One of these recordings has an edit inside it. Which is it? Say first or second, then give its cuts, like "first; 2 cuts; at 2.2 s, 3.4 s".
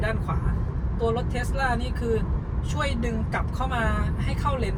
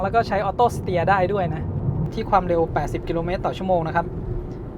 second; 1 cut; at 2.1 s